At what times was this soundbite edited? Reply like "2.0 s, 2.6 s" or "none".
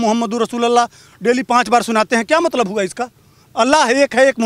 none